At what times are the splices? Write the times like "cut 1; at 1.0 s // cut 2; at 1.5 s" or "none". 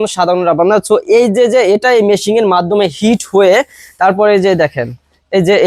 none